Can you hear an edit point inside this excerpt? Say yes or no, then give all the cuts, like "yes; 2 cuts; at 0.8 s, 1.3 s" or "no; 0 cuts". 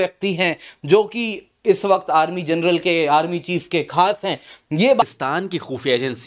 yes; 1 cut; at 5.0 s